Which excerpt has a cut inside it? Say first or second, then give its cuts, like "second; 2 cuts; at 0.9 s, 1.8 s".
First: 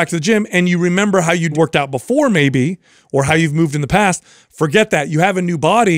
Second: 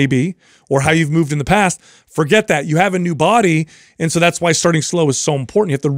first; 1 cut; at 1.5 s